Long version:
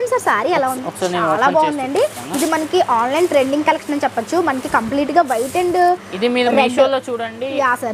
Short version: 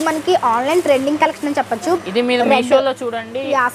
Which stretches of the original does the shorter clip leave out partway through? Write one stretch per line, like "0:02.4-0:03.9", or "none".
0:04.5-0:06.1

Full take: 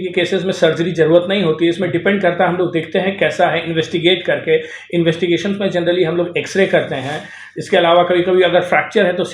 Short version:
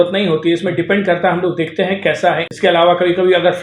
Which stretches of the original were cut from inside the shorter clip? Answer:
0:03.6-0:07.6

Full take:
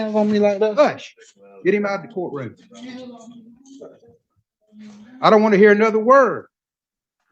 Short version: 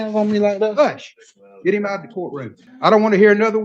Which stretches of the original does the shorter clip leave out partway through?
0:02.6-0:05.0

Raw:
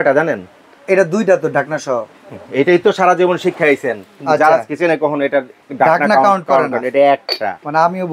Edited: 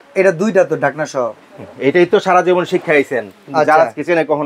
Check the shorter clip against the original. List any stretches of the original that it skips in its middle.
none

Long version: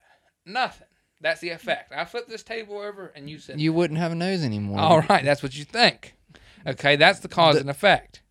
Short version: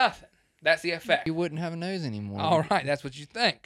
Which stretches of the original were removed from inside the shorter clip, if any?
0:01.8-0:03.6

